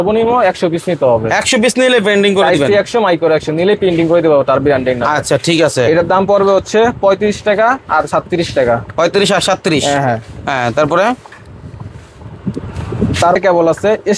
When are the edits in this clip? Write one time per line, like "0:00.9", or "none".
none